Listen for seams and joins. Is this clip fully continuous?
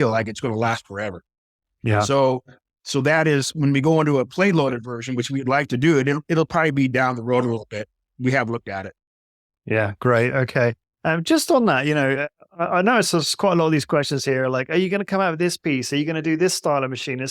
yes; 0 cuts

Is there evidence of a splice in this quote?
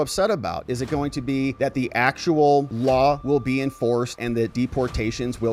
no; 0 cuts

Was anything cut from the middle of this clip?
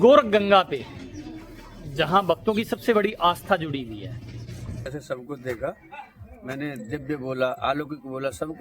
yes; 1 cut; at 4.9 s

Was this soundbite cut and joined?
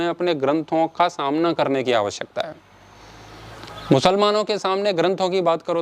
no; 0 cuts

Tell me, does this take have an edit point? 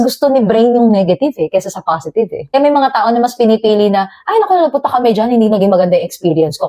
no; 0 cuts

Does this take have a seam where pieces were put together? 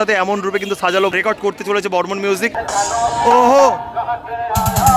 yes; 2 cuts; at 1.1 s, 2.6 s

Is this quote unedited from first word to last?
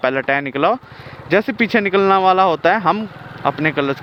yes; 0 cuts

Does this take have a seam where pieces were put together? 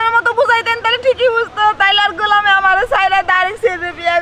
no; 0 cuts

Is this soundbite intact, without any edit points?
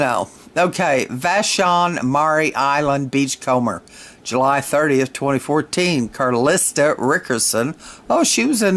yes; 0 cuts

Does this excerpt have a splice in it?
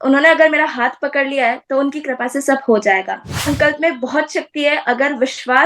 yes; 1 cut; at 3.5 s

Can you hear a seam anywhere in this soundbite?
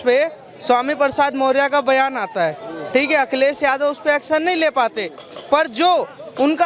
no; 0 cuts

